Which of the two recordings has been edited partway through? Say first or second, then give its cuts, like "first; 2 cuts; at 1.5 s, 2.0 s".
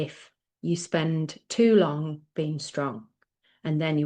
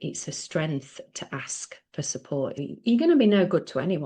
second; 1 cut; at 2.5 s